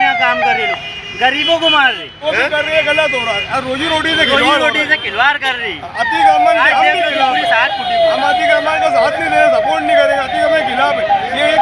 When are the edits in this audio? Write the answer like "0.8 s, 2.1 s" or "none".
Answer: 2.1 s